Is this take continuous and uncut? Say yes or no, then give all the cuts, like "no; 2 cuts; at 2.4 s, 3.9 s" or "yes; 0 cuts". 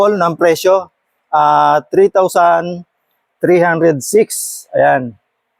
yes; 0 cuts